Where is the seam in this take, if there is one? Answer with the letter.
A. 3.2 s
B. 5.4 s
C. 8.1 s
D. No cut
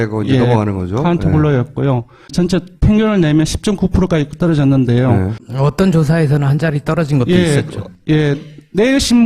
C